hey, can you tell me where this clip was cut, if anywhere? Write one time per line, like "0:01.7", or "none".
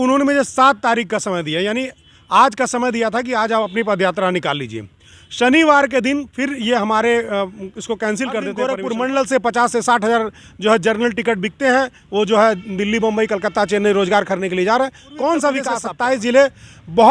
0:08.7
0:15.8